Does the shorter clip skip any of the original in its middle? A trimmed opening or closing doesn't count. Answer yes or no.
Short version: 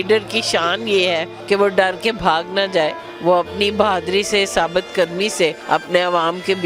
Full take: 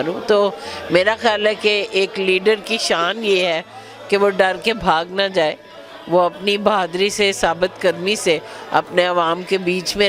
yes